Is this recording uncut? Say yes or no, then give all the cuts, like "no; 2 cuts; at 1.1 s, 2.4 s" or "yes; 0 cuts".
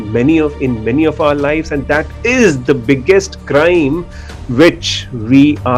yes; 0 cuts